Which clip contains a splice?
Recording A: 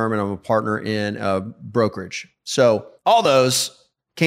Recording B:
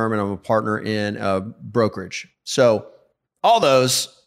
A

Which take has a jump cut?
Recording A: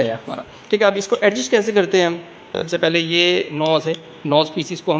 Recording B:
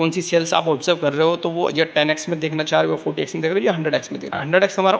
A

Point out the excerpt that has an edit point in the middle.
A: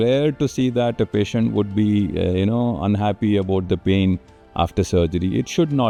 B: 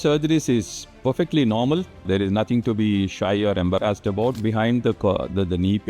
B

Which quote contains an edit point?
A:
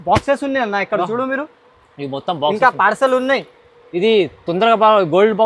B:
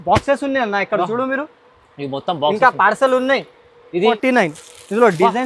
B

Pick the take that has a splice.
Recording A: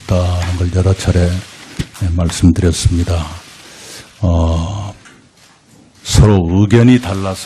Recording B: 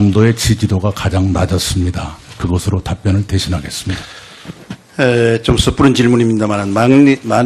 A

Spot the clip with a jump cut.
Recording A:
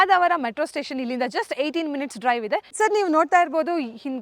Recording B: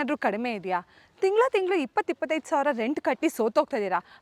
A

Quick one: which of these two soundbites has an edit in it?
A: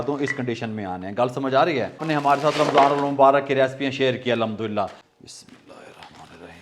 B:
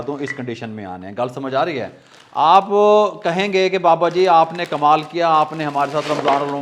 A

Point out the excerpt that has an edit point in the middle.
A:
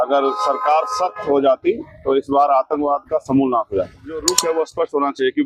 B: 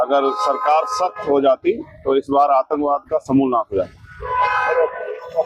A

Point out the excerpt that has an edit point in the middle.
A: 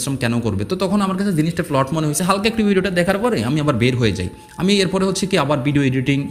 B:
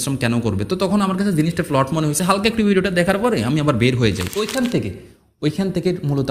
B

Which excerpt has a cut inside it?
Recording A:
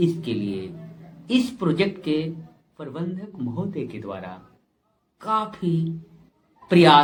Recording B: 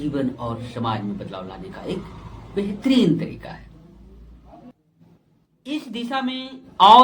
B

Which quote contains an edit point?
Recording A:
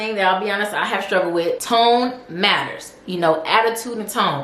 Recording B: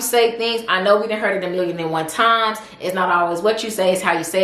A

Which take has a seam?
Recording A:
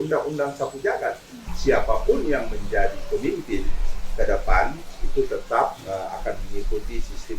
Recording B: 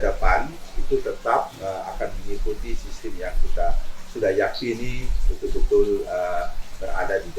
A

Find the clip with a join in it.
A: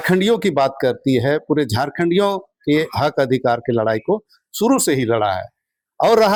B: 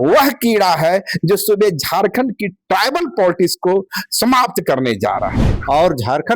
B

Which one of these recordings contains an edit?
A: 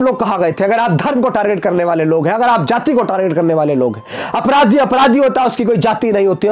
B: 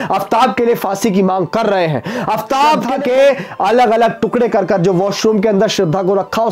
B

